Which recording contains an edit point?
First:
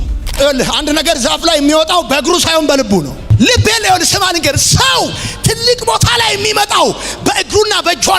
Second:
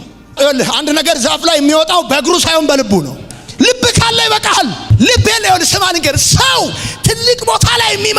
first; 1 cut; at 3.2 s

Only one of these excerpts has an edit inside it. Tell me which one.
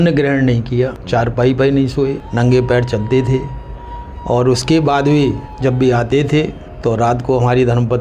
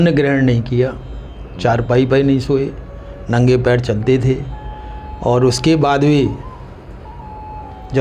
first; 4 cuts; at 1.0 s, 2.2 s, 5.5 s, 6.6 s

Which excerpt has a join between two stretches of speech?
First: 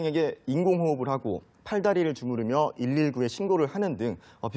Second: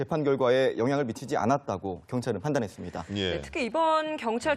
first; 1 cut; at 1.3 s

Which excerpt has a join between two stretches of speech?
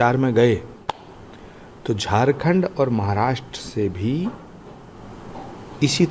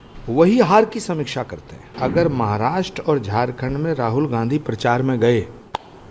second; 1 cut; at 1.9 s

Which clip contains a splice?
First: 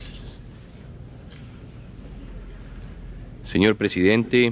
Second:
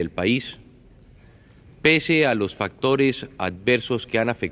second; 1 cut; at 3.4 s

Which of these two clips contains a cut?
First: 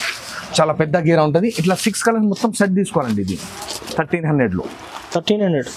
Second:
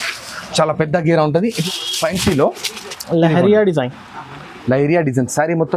second; 1 cut; at 1.6 s

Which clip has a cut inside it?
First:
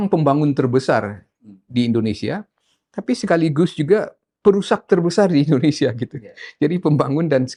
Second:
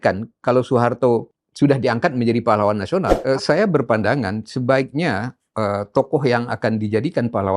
second; 2 cuts; at 1.4 s, 3.1 s

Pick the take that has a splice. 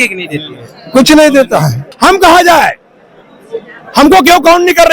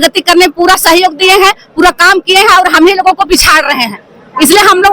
first; 1 cut; at 1.9 s

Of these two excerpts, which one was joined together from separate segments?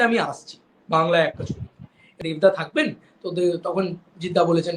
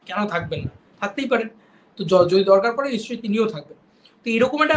first; 1 cut; at 2.2 s

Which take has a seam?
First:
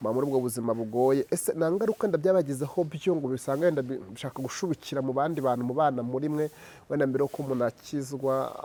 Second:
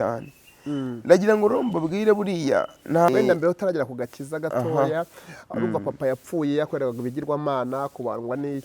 second; 1 cut; at 3.1 s

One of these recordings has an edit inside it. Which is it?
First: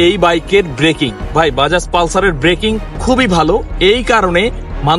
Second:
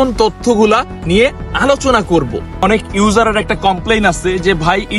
second; 1 cut; at 2.6 s

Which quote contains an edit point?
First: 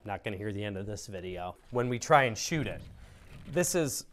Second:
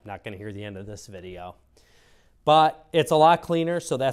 first; 1 cut; at 1.6 s

